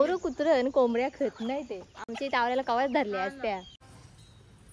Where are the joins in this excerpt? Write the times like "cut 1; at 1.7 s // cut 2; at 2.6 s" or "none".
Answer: cut 1; at 3.8 s